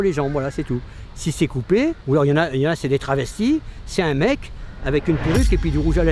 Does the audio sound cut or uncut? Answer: cut